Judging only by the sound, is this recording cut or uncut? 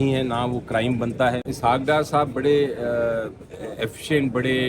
cut